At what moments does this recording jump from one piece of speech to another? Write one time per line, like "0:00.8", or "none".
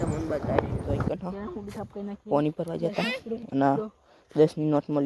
0:01.1